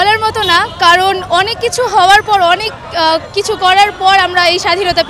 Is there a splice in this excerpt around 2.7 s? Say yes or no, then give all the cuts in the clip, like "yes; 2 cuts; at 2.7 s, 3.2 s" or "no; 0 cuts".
no; 0 cuts